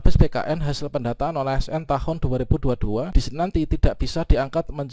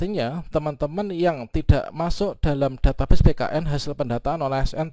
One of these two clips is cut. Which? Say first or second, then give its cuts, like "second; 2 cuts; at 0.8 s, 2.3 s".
first; 1 cut; at 3.2 s